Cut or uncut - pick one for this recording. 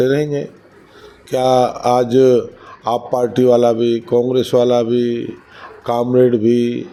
uncut